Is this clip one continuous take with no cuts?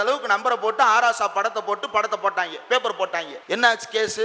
no; 1 cut; at 3.3 s

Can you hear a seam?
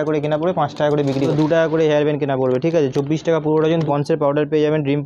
yes; 2 cuts; at 1.3 s, 3.8 s

